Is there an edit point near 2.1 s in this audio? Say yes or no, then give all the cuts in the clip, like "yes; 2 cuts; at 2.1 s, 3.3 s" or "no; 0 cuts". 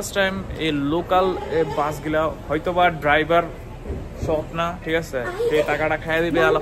no; 0 cuts